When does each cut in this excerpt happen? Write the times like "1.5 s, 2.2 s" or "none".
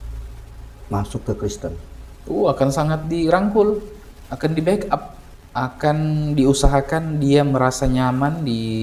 none